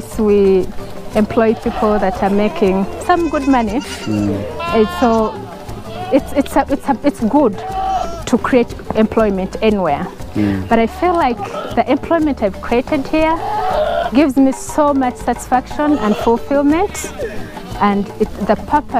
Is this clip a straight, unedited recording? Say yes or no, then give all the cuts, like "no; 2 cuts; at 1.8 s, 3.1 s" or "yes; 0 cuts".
yes; 0 cuts